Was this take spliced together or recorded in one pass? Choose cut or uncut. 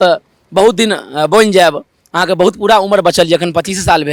uncut